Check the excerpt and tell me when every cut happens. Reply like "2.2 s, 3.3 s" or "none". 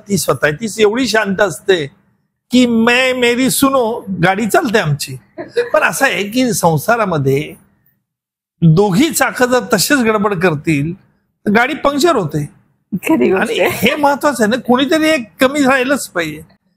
none